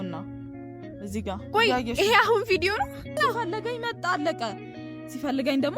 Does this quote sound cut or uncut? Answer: cut